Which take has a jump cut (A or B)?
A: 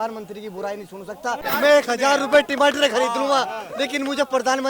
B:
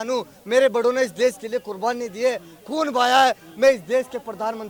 A